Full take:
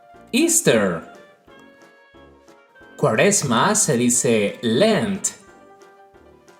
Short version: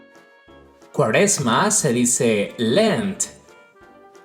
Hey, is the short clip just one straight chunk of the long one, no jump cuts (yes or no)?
no